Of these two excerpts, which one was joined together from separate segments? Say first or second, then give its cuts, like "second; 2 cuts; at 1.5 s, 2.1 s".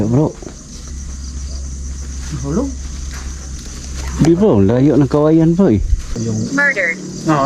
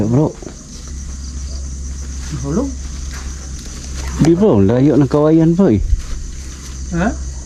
first; 1 cut; at 6.2 s